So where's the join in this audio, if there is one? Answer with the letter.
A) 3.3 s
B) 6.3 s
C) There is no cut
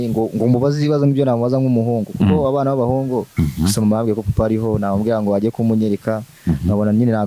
A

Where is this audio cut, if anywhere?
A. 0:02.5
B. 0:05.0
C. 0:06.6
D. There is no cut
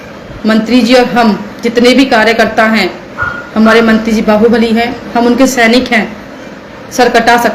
B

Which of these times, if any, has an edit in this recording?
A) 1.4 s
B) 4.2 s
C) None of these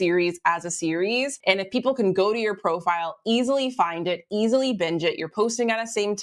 A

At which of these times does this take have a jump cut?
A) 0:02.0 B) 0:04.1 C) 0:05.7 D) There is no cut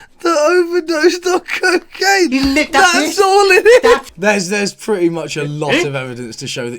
B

